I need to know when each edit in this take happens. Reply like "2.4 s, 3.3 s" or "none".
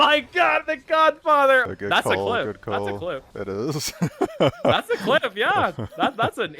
1.6 s, 3.3 s